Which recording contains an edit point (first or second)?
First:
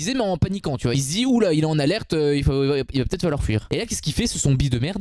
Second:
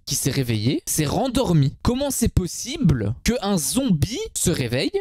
first